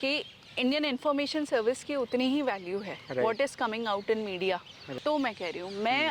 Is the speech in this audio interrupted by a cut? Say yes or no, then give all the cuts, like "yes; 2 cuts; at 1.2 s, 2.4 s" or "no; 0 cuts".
yes; 1 cut; at 4.8 s